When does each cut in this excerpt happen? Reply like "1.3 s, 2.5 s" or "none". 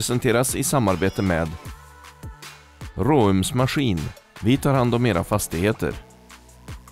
5.9 s